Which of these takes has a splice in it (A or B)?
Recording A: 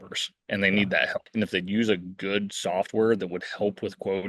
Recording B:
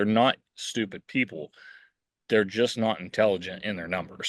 A